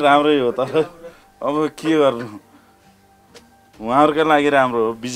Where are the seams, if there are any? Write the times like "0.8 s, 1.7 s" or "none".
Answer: none